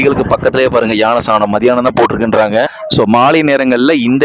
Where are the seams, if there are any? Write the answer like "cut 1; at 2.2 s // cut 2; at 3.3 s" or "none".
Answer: cut 1; at 2.8 s